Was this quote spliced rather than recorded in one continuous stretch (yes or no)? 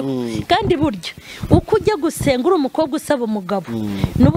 no